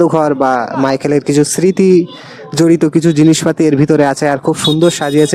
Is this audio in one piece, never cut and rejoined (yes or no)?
yes